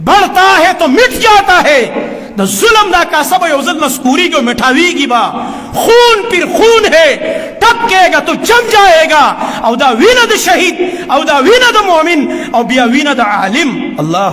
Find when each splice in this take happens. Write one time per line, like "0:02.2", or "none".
none